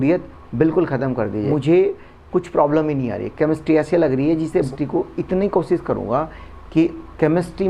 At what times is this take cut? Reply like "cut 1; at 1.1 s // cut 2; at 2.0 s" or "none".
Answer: cut 1; at 1.5 s // cut 2; at 4.7 s